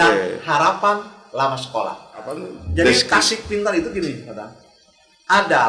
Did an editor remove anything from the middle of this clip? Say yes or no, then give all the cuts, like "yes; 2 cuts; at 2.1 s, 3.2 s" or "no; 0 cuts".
yes; 1 cut; at 2.5 s